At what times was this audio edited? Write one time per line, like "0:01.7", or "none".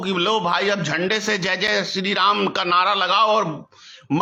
none